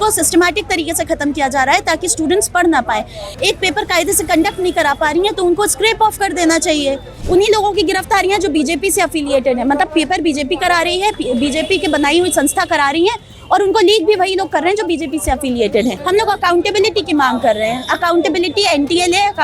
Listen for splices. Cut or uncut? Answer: cut